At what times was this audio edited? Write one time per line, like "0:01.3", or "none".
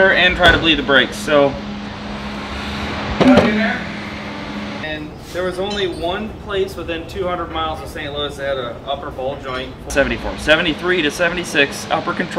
0:04.8
0:09.9